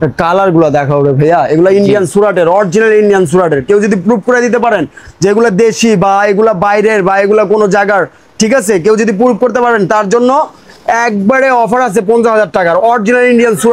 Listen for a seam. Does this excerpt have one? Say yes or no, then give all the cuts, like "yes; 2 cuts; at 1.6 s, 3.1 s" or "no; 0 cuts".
no; 0 cuts